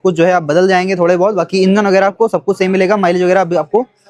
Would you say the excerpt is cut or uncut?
uncut